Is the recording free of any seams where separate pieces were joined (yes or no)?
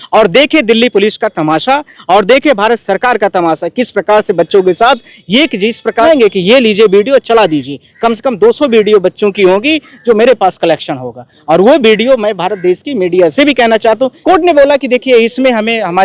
no